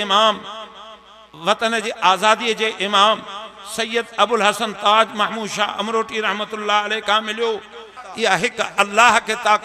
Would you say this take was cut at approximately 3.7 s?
no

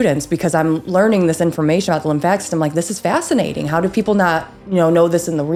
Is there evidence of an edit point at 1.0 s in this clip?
no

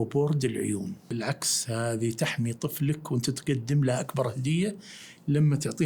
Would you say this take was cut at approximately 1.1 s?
yes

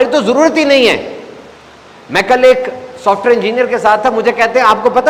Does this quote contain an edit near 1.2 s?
no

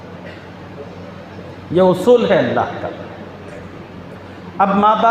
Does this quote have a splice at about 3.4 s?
no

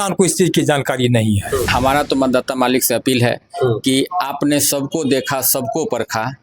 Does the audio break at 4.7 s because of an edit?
no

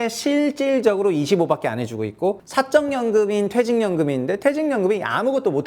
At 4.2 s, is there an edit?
no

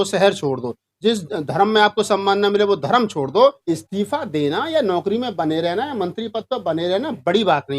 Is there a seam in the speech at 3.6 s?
yes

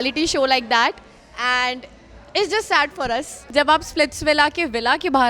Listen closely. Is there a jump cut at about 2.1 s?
no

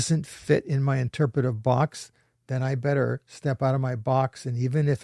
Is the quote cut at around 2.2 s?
no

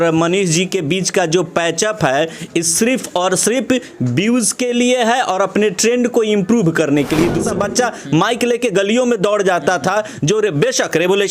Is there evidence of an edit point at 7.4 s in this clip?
yes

